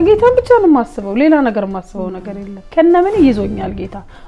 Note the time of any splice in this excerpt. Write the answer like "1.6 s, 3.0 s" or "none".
2.7 s